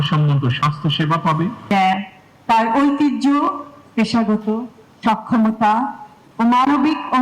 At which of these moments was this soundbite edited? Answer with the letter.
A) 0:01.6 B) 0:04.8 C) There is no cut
A